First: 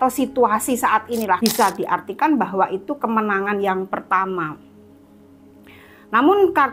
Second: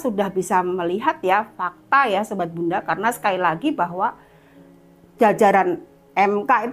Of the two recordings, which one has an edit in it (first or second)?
first